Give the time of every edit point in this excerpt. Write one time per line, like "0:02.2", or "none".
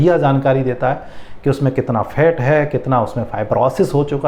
none